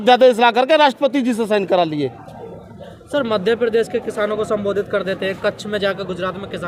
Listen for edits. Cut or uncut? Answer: uncut